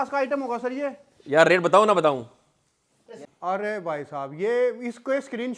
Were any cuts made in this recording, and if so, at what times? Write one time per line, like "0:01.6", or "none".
0:03.2